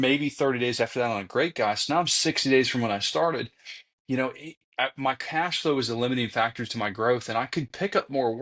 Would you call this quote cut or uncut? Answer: uncut